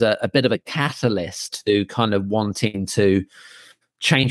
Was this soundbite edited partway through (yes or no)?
no